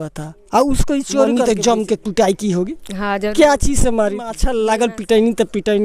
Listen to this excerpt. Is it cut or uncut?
cut